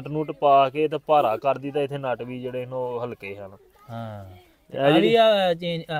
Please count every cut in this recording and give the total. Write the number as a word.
zero